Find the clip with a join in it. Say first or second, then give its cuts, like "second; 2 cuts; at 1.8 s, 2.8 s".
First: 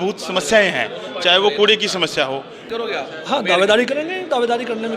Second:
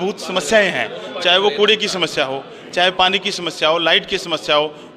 first; 1 cut; at 2.7 s